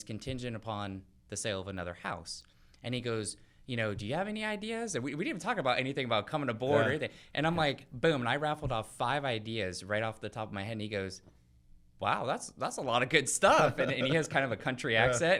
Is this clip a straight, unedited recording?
yes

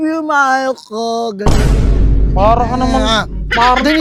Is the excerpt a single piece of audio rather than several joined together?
yes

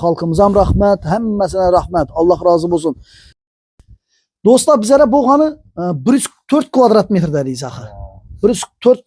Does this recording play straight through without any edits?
no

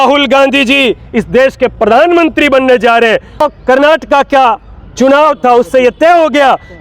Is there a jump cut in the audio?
yes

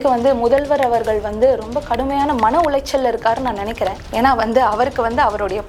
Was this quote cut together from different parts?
no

